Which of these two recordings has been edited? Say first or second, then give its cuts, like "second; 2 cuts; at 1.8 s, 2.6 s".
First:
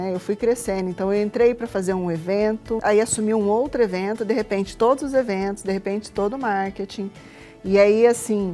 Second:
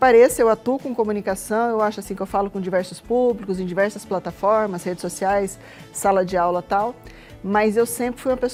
first; 1 cut; at 2.8 s